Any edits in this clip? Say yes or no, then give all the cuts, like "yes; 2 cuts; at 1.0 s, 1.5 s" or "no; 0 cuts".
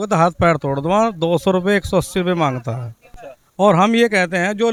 no; 0 cuts